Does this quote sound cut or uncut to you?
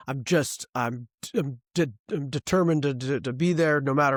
uncut